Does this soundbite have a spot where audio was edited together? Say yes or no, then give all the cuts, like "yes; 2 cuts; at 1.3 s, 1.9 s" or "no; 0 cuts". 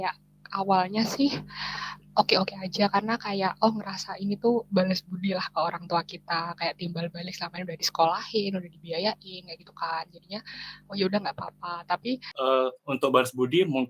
yes; 1 cut; at 12.3 s